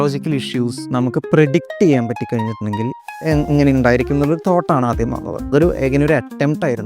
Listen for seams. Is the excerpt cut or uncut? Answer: uncut